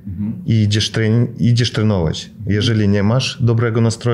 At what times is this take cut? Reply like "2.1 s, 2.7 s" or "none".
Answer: none